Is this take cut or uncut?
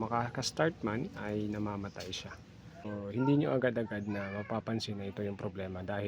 cut